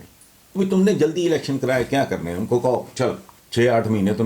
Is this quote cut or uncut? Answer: cut